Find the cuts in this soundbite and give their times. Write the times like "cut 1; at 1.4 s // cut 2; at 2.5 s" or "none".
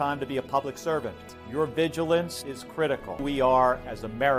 cut 1; at 1.2 s // cut 2; at 3.2 s